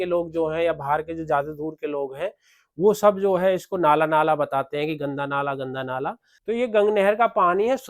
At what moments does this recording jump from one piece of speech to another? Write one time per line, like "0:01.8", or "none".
0:06.3